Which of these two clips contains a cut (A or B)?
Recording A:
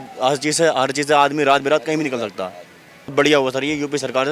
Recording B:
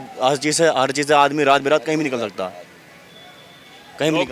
A